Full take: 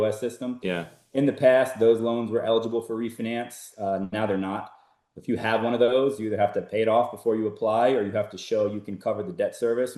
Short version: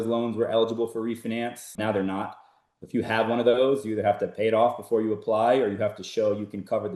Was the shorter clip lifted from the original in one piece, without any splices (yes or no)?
no